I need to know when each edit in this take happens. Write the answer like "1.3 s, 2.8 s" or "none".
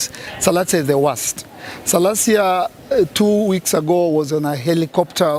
none